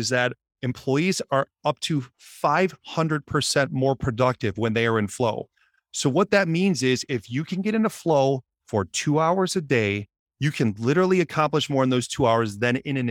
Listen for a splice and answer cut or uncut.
uncut